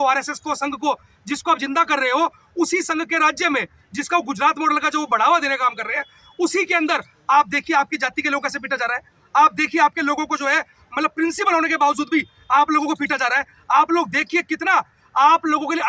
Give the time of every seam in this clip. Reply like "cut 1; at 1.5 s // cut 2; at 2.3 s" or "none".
none